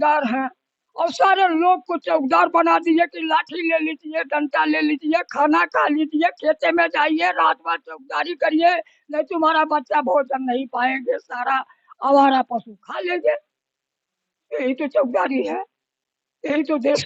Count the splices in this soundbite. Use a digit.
0